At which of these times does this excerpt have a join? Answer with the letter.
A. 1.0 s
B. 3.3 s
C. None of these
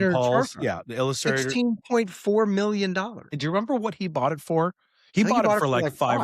B